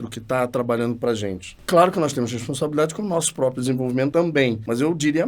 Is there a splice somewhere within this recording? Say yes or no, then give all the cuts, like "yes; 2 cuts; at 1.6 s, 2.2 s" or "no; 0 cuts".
yes; 2 cuts; at 1.5 s, 4.3 s